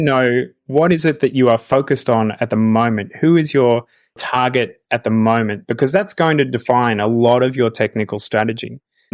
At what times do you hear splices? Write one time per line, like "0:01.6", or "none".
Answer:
none